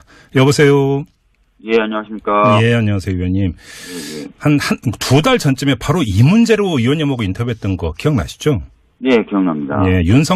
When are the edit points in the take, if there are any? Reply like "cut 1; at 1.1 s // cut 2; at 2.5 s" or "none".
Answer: cut 1; at 2.8 s